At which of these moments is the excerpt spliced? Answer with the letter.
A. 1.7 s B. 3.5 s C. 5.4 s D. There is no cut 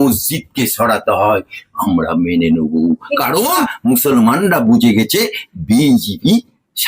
B